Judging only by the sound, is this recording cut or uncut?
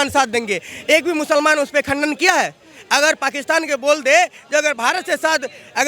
uncut